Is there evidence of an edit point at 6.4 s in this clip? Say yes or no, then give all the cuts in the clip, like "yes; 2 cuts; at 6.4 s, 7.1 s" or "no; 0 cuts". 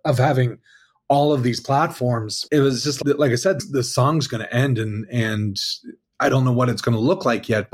no; 2 cuts; at 2.3 s, 3.0 s